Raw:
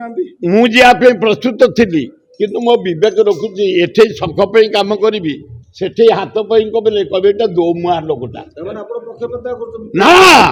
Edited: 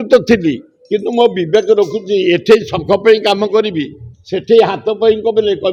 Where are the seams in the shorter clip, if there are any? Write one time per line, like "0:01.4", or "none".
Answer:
none